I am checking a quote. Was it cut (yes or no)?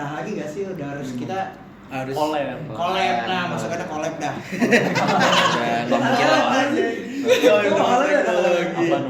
no